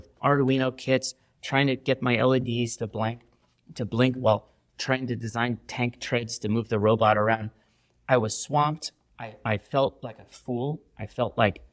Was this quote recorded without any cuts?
yes; 0 cuts

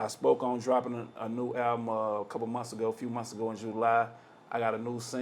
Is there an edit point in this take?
no; 0 cuts

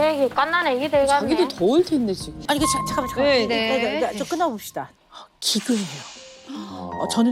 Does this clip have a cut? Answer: yes; 2 cuts; at 2.3 s, 4.9 s

